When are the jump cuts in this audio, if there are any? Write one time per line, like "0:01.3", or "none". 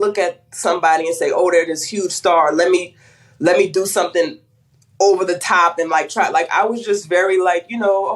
none

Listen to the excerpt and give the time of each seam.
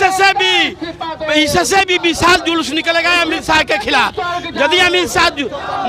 none

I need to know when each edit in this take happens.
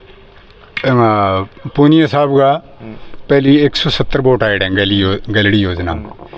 none

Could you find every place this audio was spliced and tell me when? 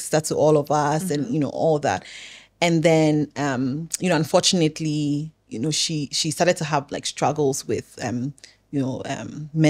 none

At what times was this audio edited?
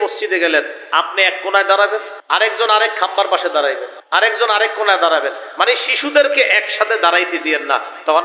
0:02.1
0:03.9

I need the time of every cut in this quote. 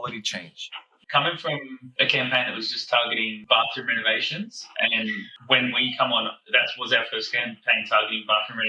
0:00.9
0:01.8
0:03.4

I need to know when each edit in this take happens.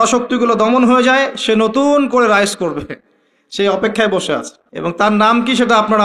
0:05.0

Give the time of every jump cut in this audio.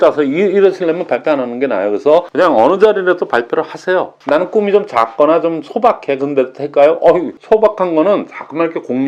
0:02.3
0:04.1
0:07.4

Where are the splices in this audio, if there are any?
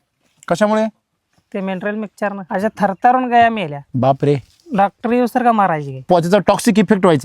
0:02.4
0:03.8
0:06.1

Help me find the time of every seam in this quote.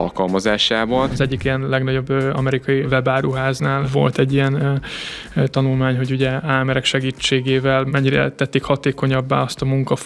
0:01.1
0:02.9
0:03.9
0:06.4
0:07.9

